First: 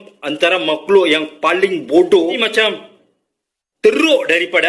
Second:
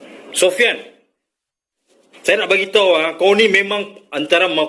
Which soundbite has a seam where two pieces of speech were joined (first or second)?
first